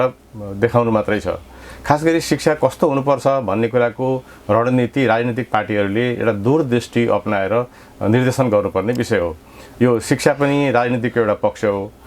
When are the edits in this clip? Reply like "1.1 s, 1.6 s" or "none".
none